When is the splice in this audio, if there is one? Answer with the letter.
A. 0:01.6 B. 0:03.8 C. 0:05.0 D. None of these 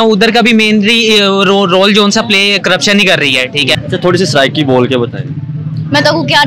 B